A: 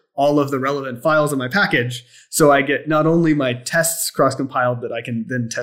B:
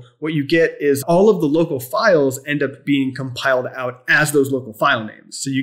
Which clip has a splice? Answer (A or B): B